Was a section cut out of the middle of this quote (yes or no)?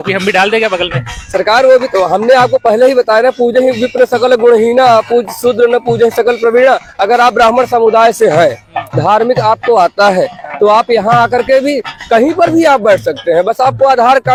no